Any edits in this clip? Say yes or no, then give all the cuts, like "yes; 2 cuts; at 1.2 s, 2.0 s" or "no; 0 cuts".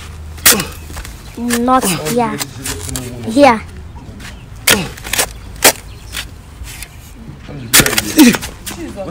no; 0 cuts